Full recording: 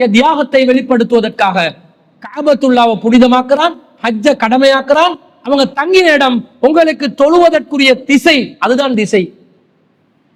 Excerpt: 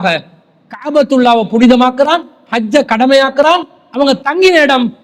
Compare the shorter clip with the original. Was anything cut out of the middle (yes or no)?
no